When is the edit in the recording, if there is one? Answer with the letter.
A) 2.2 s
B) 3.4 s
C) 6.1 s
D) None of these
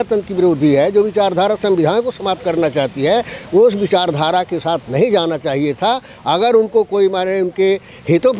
D